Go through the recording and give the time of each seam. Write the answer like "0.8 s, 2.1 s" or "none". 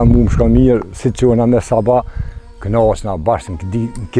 none